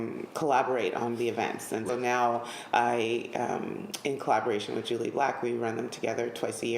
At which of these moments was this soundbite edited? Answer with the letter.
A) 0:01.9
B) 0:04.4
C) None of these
A